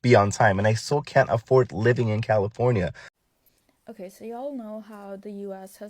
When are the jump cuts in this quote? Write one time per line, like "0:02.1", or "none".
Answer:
0:03.1